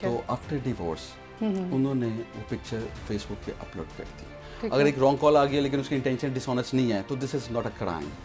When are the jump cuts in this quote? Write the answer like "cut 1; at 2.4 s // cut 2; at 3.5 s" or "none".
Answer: cut 1; at 4.4 s